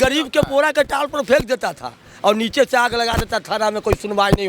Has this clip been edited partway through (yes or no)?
no